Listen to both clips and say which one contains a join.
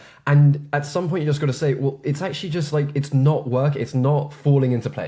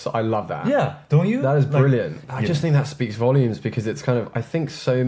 second; 1 cut; at 2.2 s

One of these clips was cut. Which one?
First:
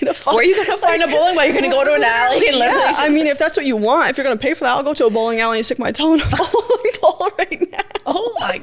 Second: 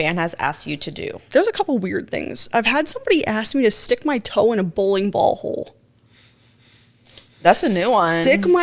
second; 2 cuts; at 1.2 s, 2.3 s

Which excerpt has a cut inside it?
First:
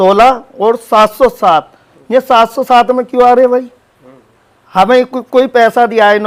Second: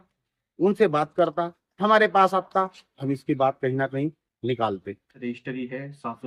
second; 1 cut; at 5.2 s

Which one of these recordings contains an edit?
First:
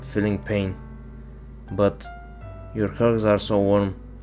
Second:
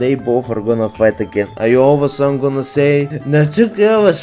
second; 2 cuts; at 1.6 s, 3.2 s

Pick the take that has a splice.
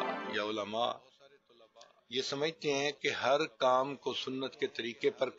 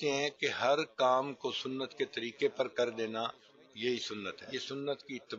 second; 1 cut; at 4.4 s

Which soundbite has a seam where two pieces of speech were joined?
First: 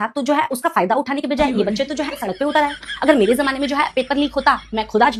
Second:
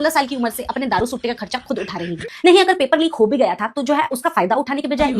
second; 1 cut; at 2.3 s

